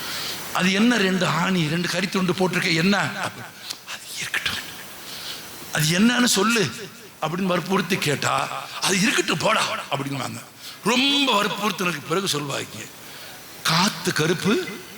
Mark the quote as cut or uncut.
uncut